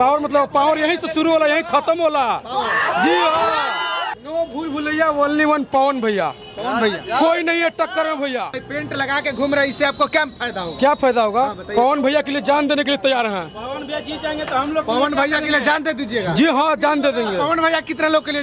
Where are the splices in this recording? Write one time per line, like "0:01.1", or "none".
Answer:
0:04.1
0:08.7